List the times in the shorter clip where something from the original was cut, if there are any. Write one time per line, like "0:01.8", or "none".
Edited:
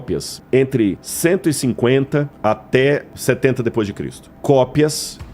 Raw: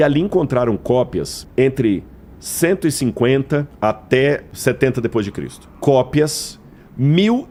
0:01.1